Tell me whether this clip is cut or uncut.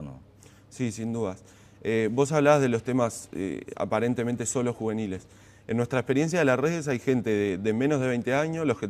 cut